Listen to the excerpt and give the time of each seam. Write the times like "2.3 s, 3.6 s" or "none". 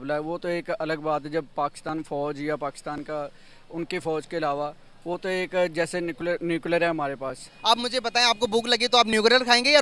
7.5 s